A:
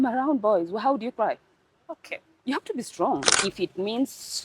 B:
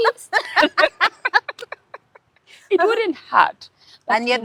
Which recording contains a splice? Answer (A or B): A